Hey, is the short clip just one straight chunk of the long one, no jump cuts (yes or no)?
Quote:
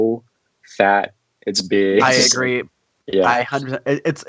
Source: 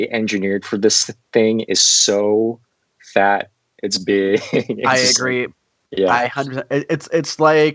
no